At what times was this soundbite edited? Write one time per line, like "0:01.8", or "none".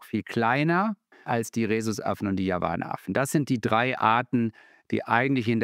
0:01.2